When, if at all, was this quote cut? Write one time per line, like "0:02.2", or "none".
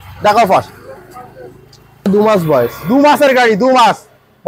0:02.1